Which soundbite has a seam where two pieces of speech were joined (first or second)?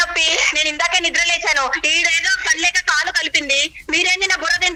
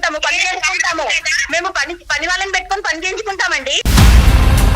second